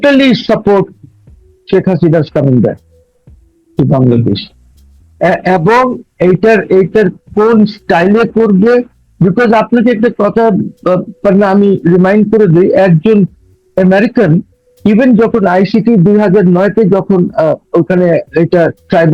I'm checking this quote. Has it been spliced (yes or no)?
no